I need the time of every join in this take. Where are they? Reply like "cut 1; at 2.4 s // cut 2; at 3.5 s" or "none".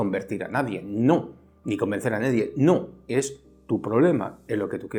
none

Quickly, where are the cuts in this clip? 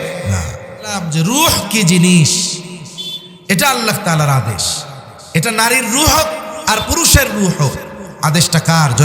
cut 1; at 1.0 s

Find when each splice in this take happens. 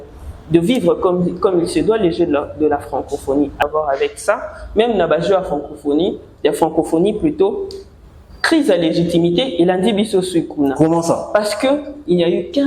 cut 1; at 3.6 s

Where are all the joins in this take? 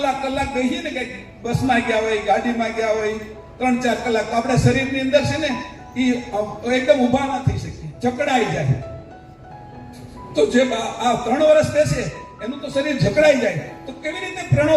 none

